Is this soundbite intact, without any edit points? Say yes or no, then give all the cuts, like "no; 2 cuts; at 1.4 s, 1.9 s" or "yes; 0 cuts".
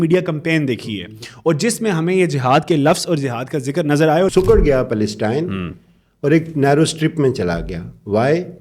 no; 1 cut; at 4.3 s